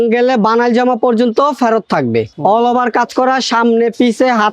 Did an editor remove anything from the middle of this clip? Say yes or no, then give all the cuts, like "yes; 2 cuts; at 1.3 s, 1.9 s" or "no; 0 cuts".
yes; 1 cut; at 2.3 s